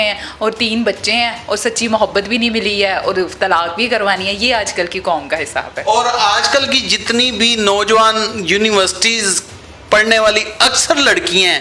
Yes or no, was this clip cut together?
no